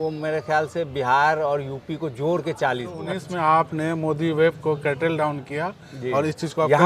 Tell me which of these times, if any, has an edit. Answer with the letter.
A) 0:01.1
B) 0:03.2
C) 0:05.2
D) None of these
B